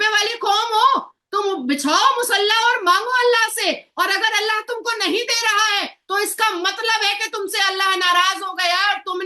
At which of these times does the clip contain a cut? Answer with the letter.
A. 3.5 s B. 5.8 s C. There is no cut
C